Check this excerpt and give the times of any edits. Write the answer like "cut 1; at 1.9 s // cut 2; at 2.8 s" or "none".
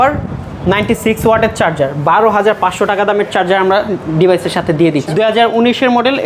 cut 1; at 5.1 s